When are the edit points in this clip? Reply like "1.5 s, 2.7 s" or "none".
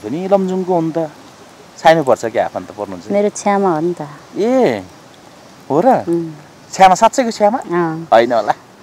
none